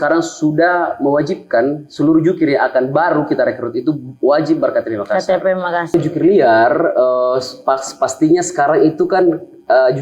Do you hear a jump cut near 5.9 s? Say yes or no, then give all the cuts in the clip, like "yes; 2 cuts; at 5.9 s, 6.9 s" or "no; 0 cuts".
yes; 1 cut; at 5.9 s